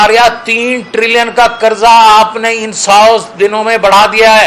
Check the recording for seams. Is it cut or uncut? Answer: uncut